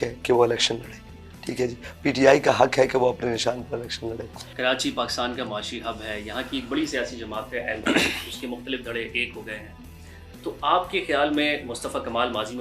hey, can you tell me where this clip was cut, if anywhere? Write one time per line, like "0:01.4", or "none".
none